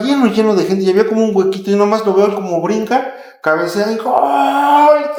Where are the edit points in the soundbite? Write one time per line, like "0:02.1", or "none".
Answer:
none

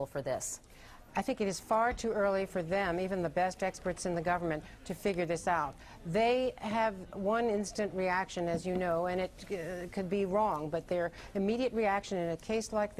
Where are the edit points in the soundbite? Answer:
none

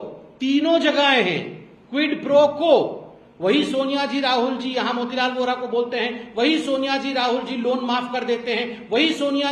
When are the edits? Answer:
none

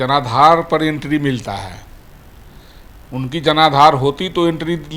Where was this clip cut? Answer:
none

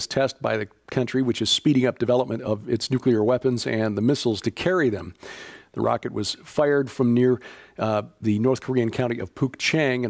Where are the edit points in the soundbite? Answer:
0:07.2

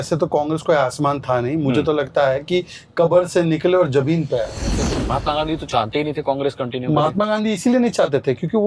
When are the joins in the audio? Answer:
0:05.0

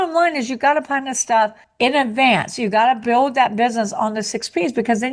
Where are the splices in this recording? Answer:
0:03.0

